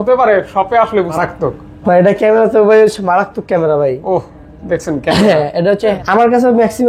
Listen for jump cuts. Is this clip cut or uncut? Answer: cut